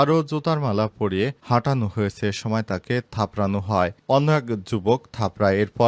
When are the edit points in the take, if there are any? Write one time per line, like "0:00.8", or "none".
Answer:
none